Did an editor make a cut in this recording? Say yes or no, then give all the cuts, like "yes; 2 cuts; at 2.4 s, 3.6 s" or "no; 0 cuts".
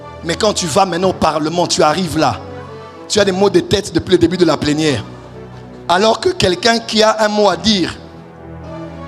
no; 0 cuts